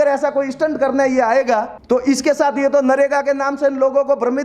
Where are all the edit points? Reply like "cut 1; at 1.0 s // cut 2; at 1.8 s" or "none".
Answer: cut 1; at 1.7 s